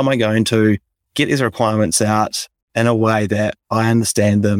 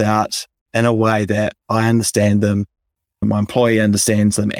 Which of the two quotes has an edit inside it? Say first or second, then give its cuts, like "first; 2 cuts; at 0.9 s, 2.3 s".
first; 1 cut; at 1.0 s